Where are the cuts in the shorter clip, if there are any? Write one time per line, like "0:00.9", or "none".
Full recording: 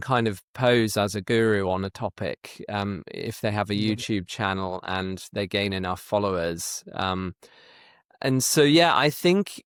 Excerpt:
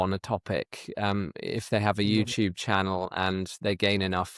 none